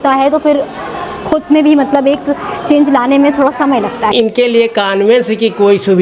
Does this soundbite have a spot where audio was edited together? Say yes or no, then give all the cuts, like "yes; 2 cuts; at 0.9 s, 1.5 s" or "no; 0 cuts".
yes; 1 cut; at 4.1 s